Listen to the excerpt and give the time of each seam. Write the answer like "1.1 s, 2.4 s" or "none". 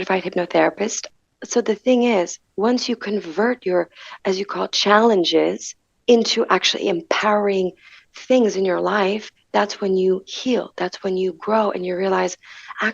1.0 s

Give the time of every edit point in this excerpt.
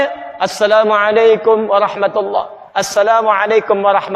none

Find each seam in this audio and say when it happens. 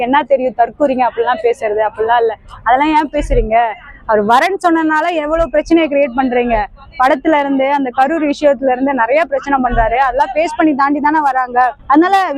none

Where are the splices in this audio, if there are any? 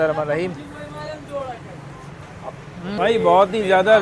3.0 s

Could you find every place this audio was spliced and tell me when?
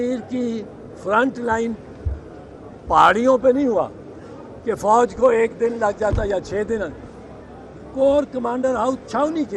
none

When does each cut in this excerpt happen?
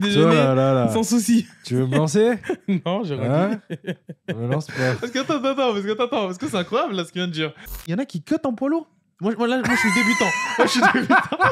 7.8 s

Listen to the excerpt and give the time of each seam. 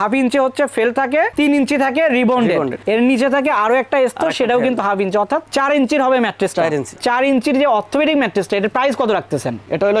1.3 s, 6.9 s

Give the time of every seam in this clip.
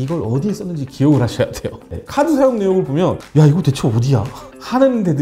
2.0 s

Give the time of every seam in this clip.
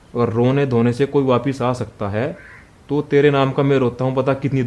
none

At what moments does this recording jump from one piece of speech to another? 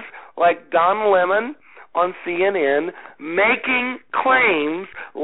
none

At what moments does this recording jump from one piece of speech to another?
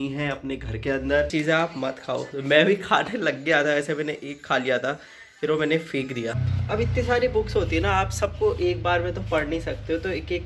1.3 s, 6.5 s

